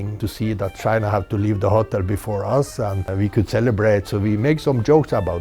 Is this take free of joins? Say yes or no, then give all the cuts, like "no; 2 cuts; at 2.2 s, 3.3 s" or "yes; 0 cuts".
no; 1 cut; at 3.1 s